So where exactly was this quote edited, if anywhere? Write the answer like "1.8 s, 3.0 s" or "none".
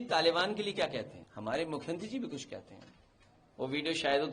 1.2 s